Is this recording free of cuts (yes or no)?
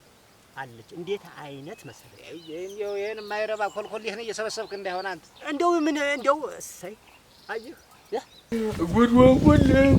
no